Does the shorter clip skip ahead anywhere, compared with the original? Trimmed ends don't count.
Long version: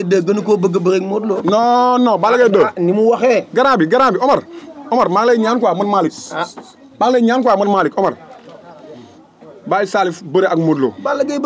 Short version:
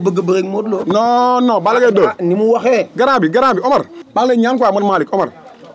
yes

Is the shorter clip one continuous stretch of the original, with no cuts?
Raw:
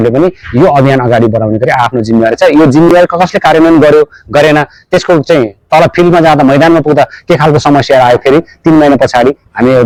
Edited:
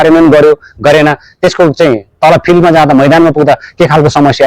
yes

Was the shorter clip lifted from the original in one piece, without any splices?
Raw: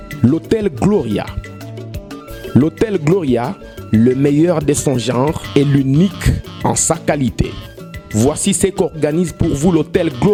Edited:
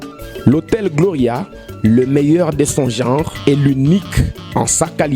yes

